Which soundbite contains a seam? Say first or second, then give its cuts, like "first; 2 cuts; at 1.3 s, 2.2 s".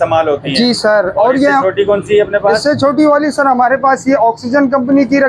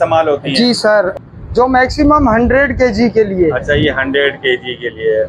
second; 1 cut; at 1.1 s